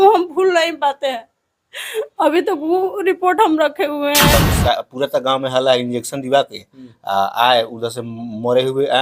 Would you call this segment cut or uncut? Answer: cut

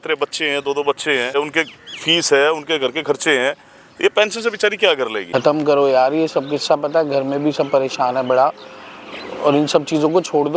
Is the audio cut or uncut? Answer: cut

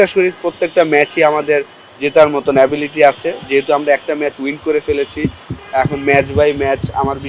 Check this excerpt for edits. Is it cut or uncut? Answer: uncut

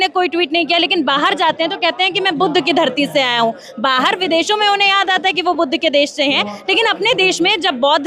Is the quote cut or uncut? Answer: uncut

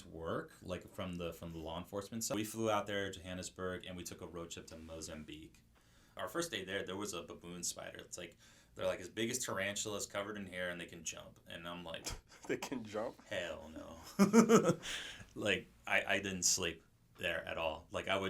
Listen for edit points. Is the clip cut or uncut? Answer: cut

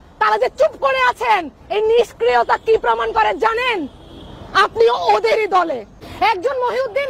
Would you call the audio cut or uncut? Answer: cut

